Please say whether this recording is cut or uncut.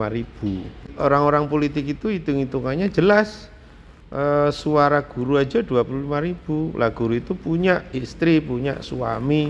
cut